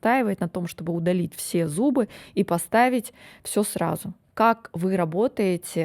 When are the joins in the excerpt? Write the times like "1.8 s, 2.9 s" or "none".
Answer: none